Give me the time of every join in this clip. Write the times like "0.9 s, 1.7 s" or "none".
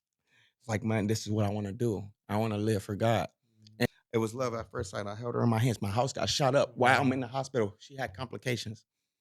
3.9 s